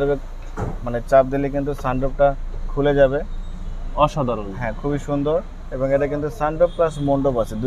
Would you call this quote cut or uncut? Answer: uncut